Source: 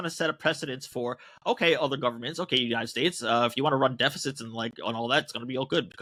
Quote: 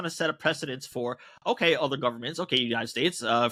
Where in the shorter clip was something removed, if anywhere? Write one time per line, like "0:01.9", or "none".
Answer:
none